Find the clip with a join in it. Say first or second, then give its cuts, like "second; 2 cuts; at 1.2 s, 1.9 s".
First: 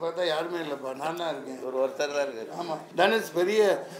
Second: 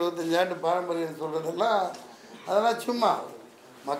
first; 1 cut; at 2.8 s